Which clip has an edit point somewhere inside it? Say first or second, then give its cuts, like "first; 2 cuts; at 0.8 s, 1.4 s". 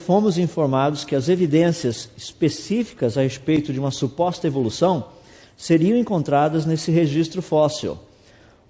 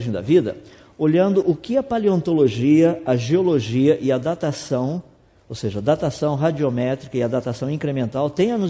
second; 1 cut; at 3.4 s